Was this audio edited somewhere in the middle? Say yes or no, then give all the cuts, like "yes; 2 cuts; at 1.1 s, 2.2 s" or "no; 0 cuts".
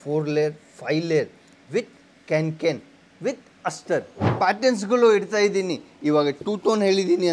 yes; 1 cut; at 4.2 s